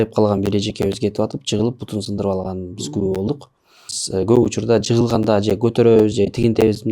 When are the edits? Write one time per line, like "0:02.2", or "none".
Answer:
0:04.0